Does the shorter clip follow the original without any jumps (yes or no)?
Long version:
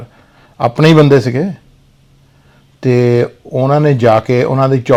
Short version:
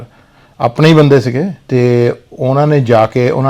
no